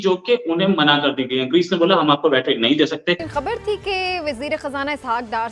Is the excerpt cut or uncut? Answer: cut